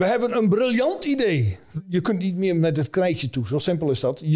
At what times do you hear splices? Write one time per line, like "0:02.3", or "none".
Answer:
0:01.6